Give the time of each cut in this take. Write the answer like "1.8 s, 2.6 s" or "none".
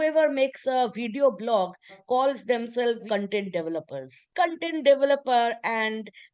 4.3 s